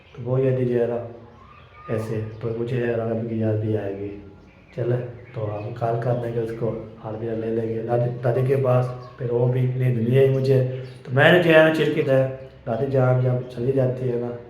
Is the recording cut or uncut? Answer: cut